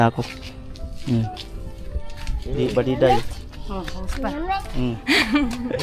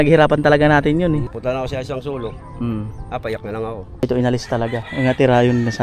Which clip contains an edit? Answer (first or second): second